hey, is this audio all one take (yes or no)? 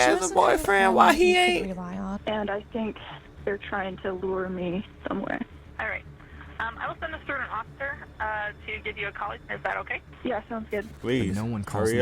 no